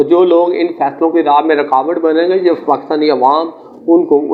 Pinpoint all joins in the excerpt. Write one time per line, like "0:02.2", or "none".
none